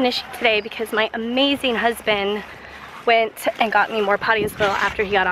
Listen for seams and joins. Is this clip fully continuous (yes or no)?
yes